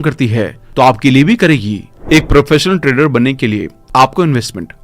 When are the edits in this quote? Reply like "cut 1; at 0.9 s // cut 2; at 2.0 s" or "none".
cut 1; at 1.9 s